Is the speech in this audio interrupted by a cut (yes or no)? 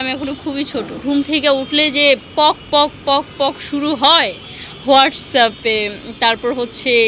yes